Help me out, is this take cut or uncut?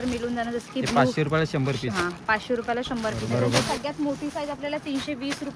cut